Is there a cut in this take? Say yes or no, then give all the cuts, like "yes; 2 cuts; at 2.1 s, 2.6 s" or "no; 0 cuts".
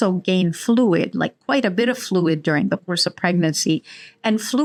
no; 0 cuts